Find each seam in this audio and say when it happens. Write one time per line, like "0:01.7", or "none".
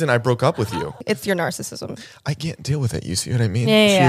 0:01.0